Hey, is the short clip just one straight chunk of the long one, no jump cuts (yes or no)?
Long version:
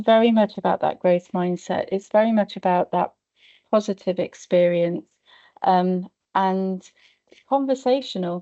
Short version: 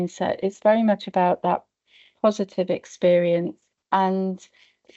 no